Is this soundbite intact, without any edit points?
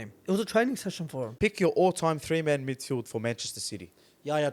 no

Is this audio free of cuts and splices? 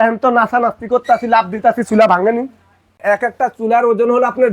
no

